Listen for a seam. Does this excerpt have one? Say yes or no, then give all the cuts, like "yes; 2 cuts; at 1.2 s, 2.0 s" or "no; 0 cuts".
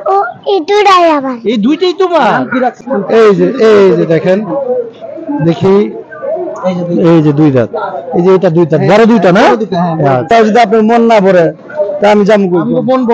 yes; 2 cuts; at 2.8 s, 10.3 s